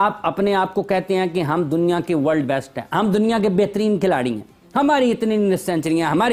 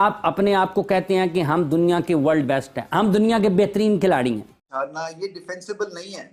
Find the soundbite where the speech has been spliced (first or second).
second